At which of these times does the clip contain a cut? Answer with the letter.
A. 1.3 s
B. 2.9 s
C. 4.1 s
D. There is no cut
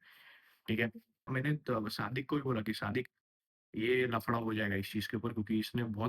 A